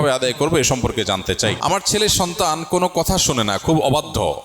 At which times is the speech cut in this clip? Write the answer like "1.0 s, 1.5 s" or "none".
1.6 s